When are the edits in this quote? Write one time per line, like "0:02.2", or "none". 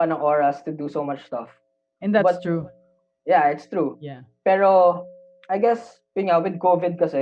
none